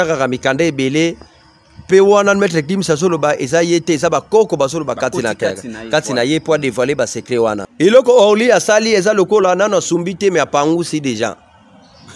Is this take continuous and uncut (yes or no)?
no